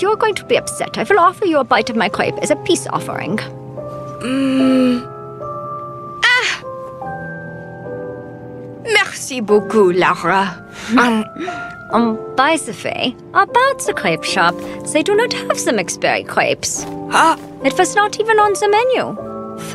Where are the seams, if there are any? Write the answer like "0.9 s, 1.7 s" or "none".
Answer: 2.9 s